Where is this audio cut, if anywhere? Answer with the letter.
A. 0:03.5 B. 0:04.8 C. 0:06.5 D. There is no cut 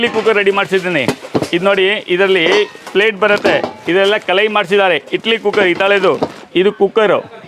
D